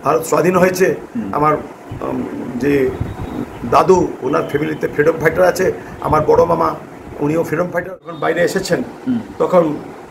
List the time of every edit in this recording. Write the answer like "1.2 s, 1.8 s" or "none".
8.1 s